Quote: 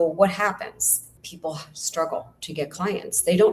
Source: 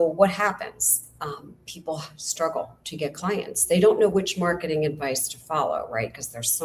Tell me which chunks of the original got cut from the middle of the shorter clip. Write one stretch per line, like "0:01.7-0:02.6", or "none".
0:01.1-0:01.5

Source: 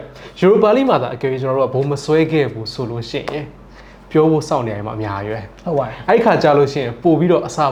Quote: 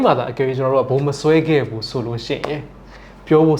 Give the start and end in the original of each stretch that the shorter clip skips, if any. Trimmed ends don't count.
none

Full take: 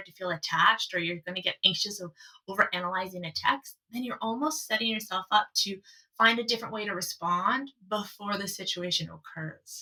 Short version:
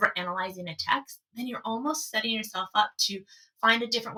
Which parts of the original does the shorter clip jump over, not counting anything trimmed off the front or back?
none

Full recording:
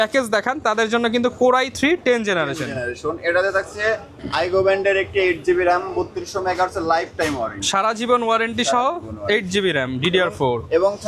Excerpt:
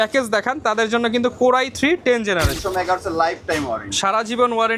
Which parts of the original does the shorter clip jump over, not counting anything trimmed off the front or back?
0:02.6-0:06.3

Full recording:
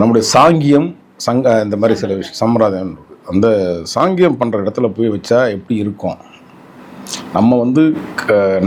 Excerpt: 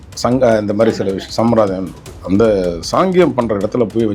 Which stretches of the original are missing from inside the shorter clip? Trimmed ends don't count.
none

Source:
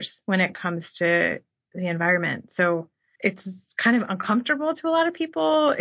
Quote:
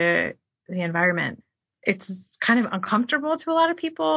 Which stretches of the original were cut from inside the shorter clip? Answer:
0:02.5-0:02.8

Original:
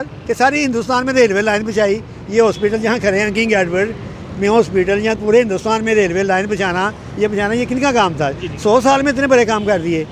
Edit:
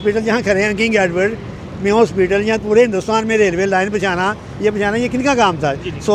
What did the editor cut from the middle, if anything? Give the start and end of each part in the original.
none

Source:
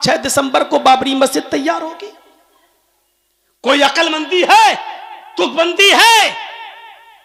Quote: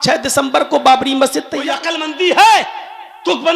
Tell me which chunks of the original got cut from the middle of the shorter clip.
0:01.9-0:04.0

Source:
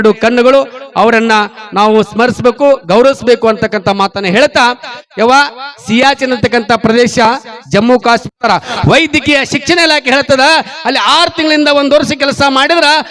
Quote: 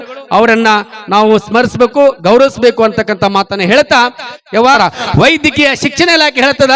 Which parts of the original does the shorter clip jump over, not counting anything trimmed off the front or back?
0:05.4-0:08.5

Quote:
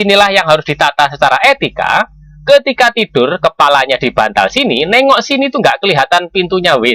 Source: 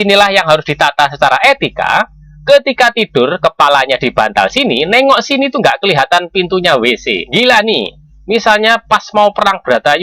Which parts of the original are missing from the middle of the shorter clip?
none

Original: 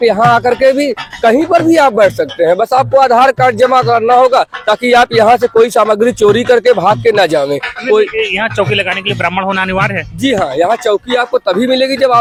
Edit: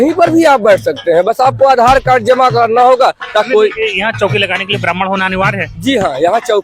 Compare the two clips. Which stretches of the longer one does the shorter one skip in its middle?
0:04.8-0:07.8

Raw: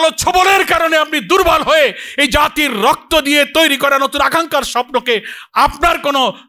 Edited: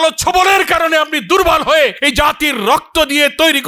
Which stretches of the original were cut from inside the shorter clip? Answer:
0:02.0-0:02.2

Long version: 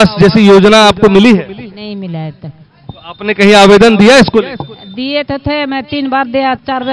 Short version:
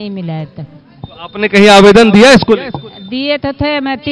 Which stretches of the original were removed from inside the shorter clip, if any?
none

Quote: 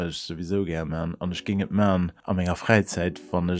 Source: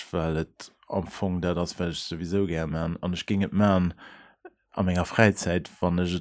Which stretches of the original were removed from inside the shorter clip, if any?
0:04.0-0:04.7

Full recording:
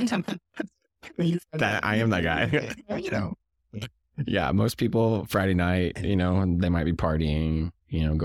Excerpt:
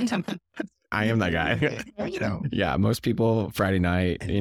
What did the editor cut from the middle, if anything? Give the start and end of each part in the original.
0:00.9-0:01.8
0:03.3-0:04.2

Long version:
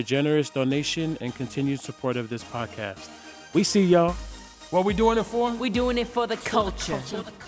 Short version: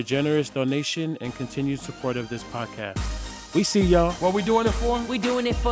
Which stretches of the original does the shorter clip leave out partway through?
0:04.2-0:04.7

